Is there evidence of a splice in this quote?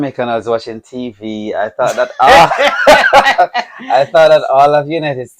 no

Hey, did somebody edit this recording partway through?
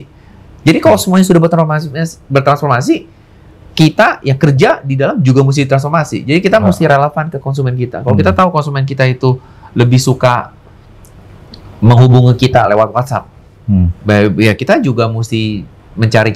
no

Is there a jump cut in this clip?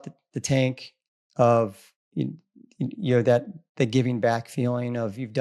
no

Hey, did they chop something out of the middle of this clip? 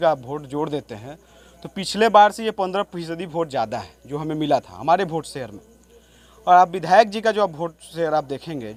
no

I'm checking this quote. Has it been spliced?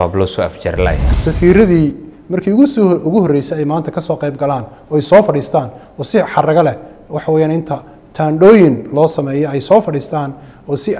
yes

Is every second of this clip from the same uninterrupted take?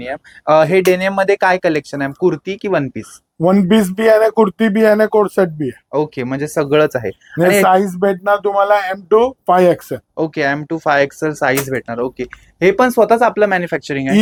yes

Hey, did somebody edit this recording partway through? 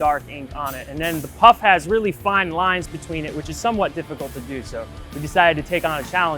no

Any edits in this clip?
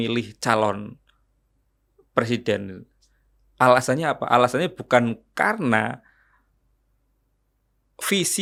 no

